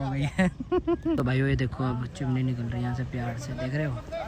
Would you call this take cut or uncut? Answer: cut